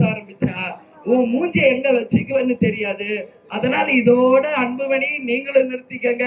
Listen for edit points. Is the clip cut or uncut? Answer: uncut